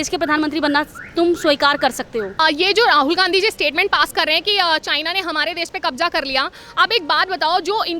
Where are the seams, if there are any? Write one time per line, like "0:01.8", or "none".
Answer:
0:02.3